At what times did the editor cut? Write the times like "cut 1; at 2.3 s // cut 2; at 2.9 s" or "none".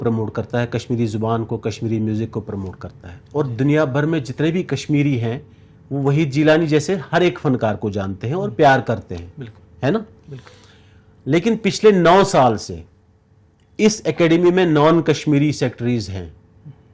none

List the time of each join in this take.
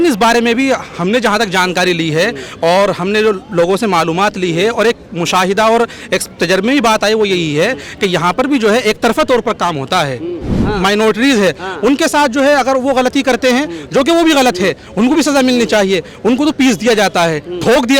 cut 1; at 10.5 s // cut 2; at 16.5 s

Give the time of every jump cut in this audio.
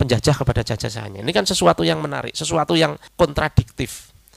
cut 1; at 3.0 s

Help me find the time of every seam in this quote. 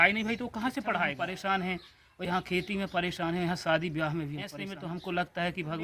cut 1; at 1.1 s // cut 2; at 4.5 s

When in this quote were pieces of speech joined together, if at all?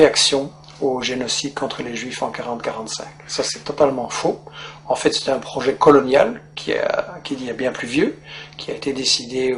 none

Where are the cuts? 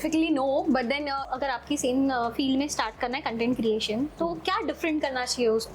cut 1; at 1.3 s

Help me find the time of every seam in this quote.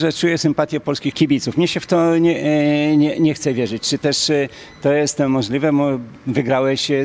cut 1; at 1.1 s

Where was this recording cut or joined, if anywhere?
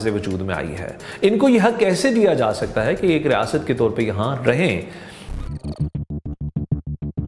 cut 1; at 5.2 s

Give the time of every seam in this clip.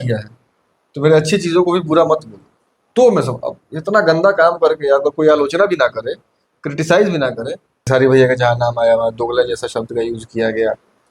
cut 1; at 7.9 s

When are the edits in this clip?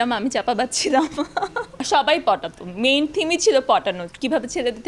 none

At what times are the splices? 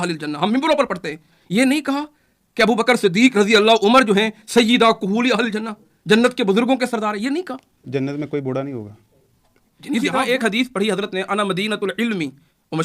cut 1; at 10.0 s

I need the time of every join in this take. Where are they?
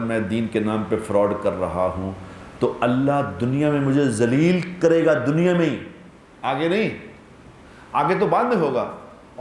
none

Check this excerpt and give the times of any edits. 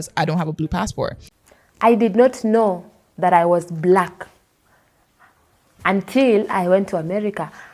cut 1; at 1.2 s

